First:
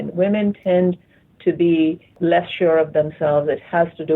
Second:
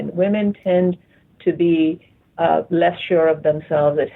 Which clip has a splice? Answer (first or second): first